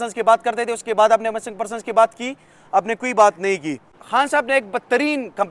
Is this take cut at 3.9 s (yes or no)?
yes